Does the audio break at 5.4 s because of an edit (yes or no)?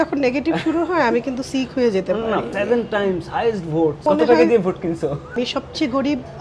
yes